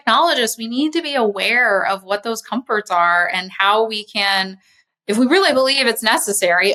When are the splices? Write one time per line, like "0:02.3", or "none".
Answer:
none